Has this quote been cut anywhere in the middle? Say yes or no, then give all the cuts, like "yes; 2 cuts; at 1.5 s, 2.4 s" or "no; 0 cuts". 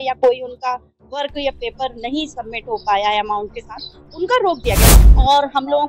yes; 1 cut; at 4.9 s